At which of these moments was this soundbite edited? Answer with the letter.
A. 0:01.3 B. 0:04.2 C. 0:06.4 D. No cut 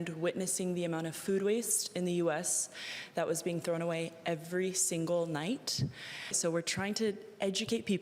C